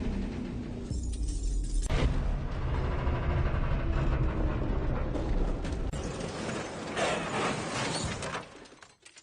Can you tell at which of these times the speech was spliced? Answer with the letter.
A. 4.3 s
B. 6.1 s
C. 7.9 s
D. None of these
D